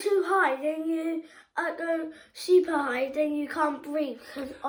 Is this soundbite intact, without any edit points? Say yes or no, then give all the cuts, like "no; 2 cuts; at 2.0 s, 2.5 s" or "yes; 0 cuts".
yes; 0 cuts